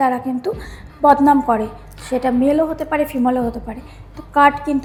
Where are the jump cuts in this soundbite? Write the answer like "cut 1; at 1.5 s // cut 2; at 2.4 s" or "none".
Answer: none